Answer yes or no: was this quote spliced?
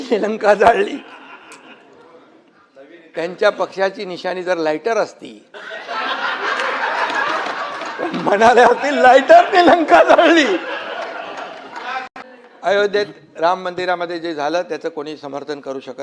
yes